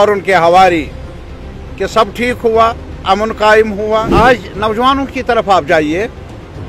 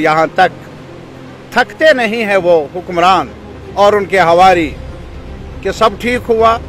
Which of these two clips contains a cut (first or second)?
first